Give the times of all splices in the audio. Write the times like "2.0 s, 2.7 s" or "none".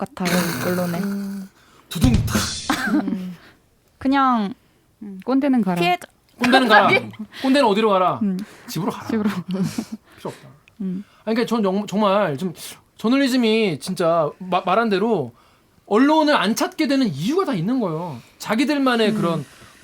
none